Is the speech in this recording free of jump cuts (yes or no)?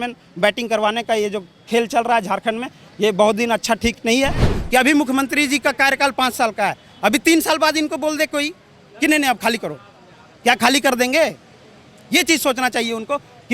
no